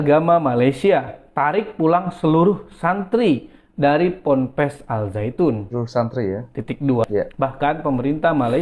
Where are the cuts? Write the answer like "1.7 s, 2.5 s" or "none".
7.0 s